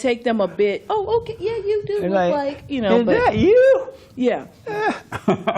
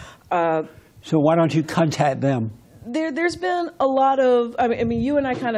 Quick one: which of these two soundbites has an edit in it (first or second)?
first